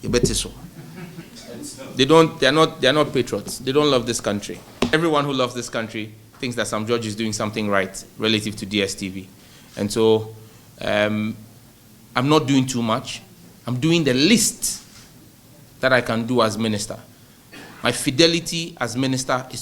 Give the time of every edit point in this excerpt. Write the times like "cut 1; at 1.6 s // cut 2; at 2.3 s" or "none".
cut 1; at 1.3 s // cut 2; at 4.9 s

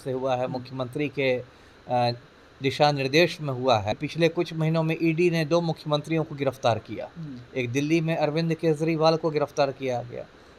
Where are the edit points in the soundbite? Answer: cut 1; at 3.9 s

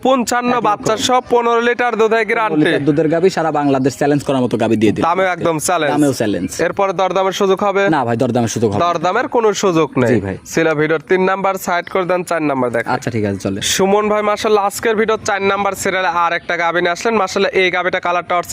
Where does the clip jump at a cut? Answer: none

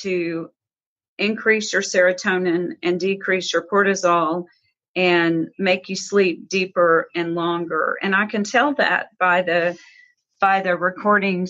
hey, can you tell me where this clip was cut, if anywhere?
none

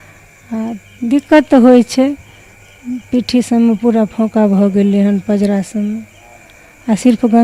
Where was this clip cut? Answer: none

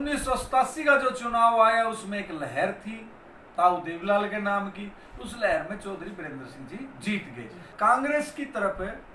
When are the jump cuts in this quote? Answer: cut 1; at 7.7 s

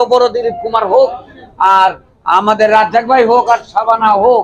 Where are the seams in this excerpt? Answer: none

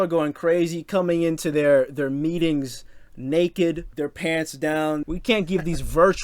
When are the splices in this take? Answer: cut 1; at 3.9 s // cut 2; at 5.1 s

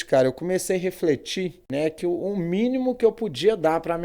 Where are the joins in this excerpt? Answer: cut 1; at 1.6 s

